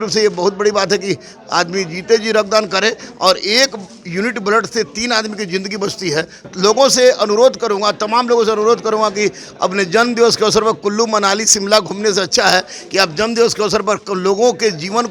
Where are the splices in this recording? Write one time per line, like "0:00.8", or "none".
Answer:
0:06.5